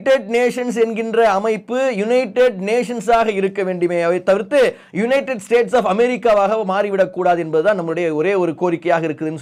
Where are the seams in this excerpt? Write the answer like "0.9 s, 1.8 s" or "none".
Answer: none